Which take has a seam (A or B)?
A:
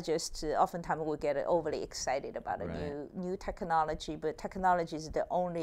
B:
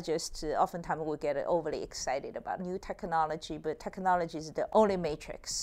B